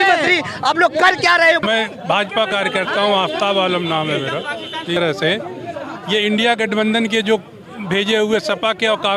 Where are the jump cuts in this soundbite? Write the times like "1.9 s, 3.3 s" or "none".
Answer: 1.6 s, 5.0 s